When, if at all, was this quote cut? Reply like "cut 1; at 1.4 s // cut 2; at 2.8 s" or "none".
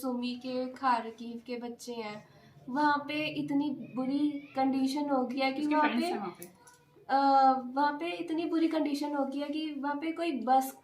none